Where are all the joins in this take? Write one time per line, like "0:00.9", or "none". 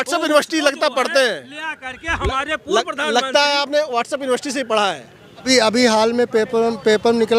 0:05.4

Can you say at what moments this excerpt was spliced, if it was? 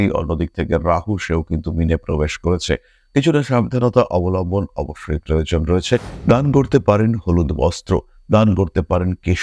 0:06.1

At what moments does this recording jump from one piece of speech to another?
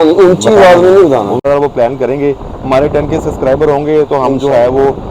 0:01.4

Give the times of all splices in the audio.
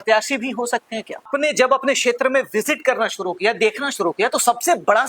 0:01.3

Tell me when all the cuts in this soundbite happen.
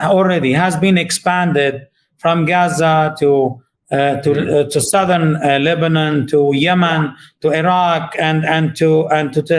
none

